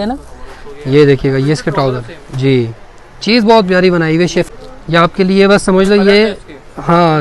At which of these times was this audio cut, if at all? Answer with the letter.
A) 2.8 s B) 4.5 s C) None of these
B